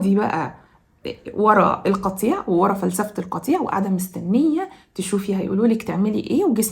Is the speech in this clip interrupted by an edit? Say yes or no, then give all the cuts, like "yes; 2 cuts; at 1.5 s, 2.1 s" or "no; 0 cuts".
no; 0 cuts